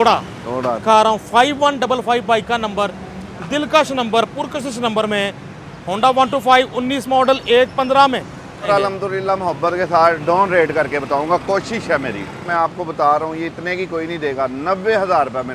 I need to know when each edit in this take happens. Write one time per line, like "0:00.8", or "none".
0:00.8
0:08.7
0:12.5